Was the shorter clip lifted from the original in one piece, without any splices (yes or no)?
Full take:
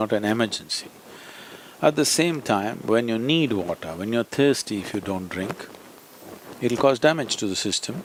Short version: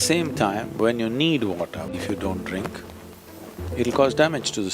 no